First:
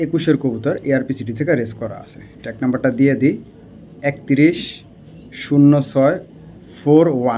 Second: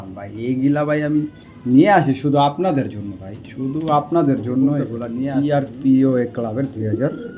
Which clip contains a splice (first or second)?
second